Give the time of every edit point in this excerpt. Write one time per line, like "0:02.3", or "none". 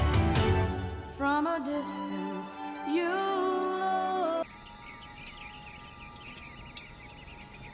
0:04.4